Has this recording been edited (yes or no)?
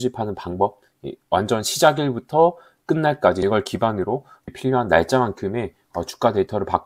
yes